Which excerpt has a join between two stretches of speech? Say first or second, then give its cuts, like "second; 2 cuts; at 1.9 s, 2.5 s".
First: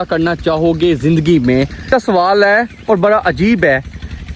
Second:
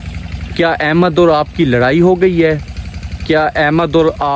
first; 1 cut; at 1.9 s